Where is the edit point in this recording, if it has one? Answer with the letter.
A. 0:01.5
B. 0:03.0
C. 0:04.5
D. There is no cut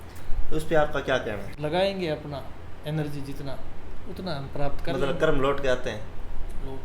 A